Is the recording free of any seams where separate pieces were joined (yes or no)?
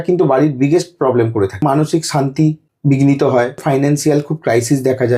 no